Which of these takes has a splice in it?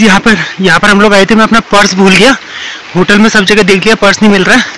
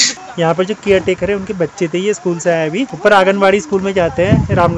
second; 1 cut; at 2.9 s

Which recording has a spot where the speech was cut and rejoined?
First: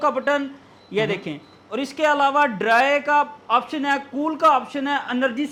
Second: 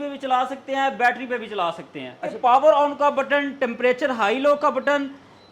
second; 1 cut; at 2.3 s

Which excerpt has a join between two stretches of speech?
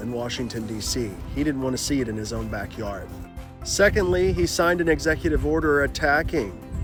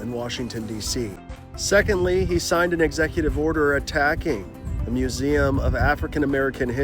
second; 1 cut; at 1.2 s

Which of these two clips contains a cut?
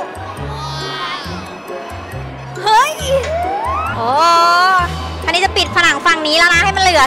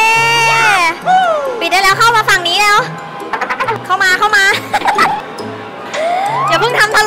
first; 1 cut; at 3.9 s

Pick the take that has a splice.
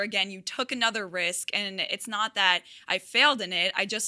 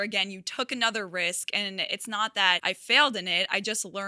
second; 1 cut; at 2.6 s

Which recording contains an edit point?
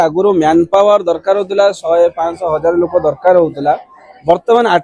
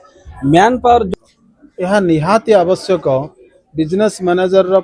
second; 1 cut; at 1.1 s

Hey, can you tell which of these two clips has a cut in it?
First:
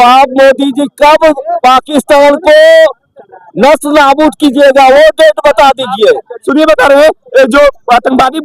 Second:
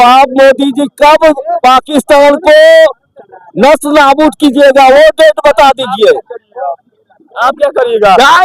first; 1 cut; at 6.4 s

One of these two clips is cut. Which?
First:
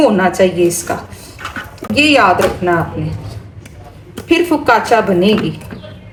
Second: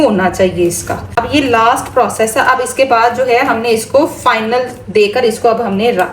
second; 1 cut; at 1.2 s

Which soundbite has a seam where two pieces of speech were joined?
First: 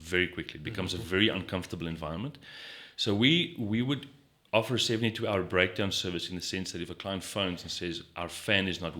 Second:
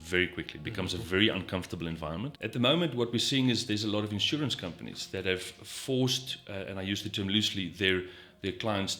second; 1 cut; at 2.4 s

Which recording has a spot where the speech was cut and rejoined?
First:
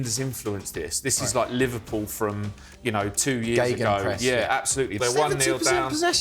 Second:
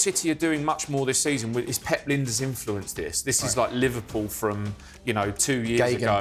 first; 1 cut; at 5.0 s

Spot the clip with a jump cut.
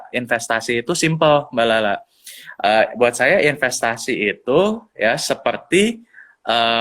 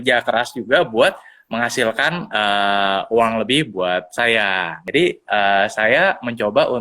second; 1 cut; at 4.8 s

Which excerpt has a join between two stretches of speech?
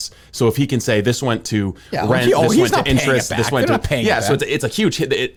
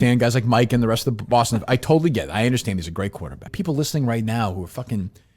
second; 1 cut; at 3.5 s

